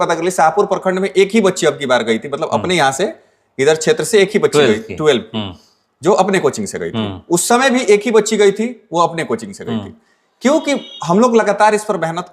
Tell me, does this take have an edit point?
no; 0 cuts

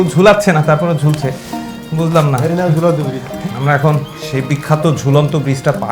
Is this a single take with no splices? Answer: no; 1 cut; at 3.4 s

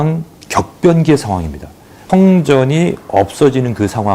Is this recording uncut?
no; 1 cut; at 2.0 s

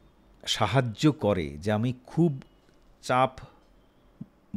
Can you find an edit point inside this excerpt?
no; 0 cuts

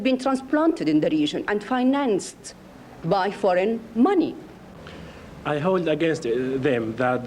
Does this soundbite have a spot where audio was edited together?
no; 0 cuts

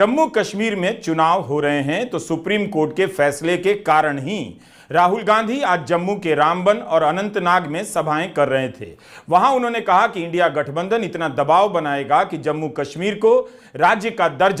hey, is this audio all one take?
yes; 0 cuts

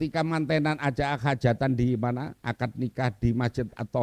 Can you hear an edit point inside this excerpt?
no; 0 cuts

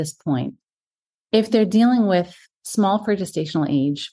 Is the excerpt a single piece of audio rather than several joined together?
yes; 0 cuts

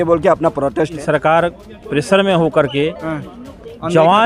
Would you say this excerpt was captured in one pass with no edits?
no; 1 cut; at 0.9 s

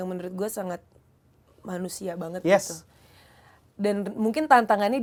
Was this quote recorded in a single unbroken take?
yes; 0 cuts

